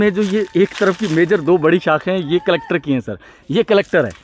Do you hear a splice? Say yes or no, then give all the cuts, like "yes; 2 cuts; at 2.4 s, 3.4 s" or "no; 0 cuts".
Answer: no; 0 cuts